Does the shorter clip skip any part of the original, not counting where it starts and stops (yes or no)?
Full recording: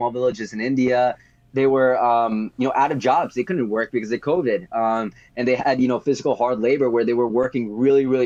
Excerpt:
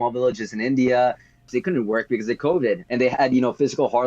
yes